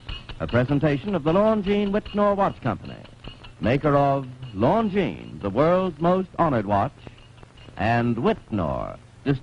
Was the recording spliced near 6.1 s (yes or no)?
yes